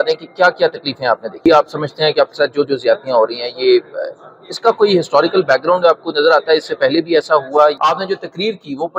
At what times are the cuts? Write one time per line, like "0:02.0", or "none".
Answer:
0:01.4
0:07.8